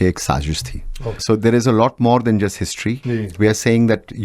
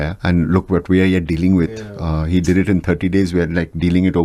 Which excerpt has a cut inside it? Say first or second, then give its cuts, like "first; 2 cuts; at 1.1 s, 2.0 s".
first; 2 cuts; at 1.2 s, 3.2 s